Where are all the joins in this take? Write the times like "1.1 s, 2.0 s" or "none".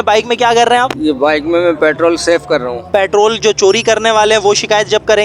2.9 s